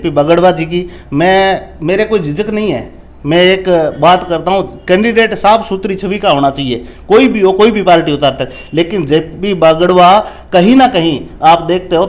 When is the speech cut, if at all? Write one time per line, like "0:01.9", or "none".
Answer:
none